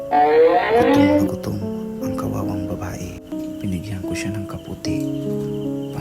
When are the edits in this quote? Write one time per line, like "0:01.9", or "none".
0:03.3